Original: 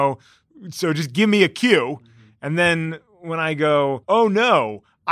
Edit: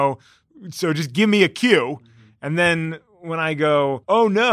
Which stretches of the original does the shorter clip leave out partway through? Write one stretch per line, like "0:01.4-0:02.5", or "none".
none